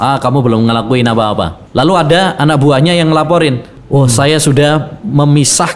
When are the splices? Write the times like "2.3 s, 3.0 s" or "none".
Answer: 1.6 s, 3.7 s